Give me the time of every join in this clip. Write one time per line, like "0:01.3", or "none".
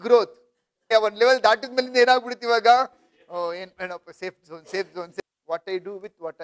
0:00.9
0:05.2